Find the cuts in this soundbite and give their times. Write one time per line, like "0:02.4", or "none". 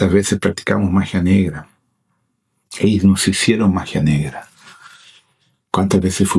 none